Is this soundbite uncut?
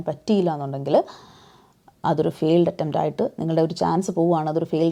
yes; 0 cuts

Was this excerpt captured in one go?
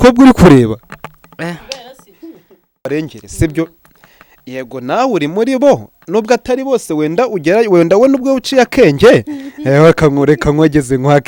no; 1 cut; at 2.9 s

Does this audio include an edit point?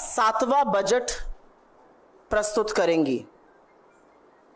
no; 0 cuts

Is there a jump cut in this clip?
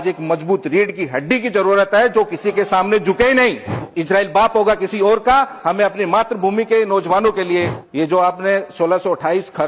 yes; 2 cuts; at 3.9 s, 7.8 s

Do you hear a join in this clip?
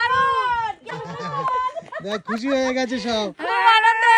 yes; 1 cut; at 0.9 s

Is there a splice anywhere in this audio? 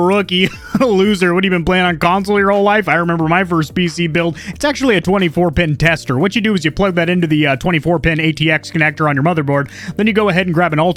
no; 0 cuts

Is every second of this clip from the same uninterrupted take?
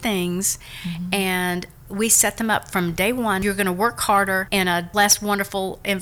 no; 2 cuts; at 3.4 s, 4.8 s

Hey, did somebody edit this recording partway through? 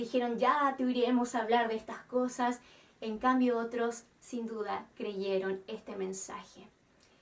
yes; 1 cut; at 4.8 s

